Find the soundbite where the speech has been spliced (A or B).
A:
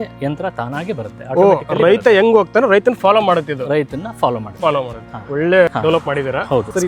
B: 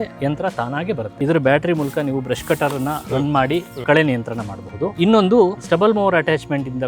B